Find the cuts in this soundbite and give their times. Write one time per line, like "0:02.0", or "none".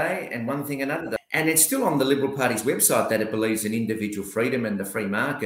0:01.1